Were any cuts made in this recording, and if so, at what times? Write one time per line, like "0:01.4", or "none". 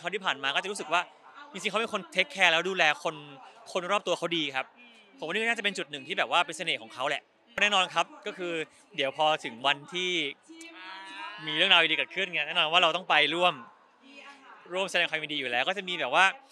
0:07.6